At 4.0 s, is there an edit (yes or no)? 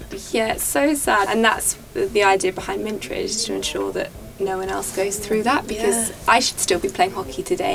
no